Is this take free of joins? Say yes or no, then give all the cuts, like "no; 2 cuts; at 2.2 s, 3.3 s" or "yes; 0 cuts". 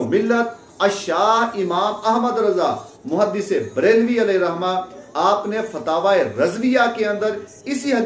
yes; 0 cuts